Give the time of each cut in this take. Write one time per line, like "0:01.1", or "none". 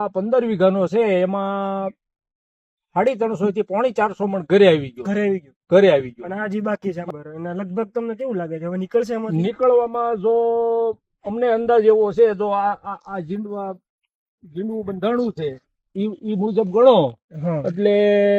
0:07.0